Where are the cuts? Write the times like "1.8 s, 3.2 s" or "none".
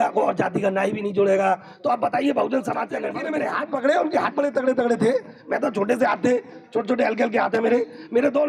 3.1 s